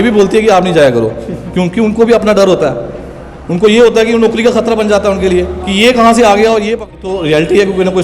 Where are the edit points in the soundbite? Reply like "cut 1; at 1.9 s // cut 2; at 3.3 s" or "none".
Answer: cut 1; at 6.9 s